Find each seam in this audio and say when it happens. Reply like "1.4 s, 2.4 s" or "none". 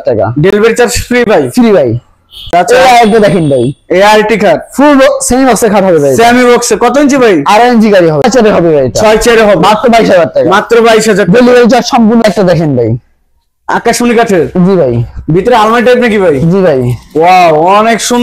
2.5 s, 8.2 s, 12.2 s